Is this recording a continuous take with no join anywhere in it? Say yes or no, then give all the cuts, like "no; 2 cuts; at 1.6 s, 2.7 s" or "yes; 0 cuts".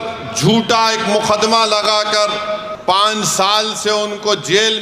no; 1 cut; at 2.7 s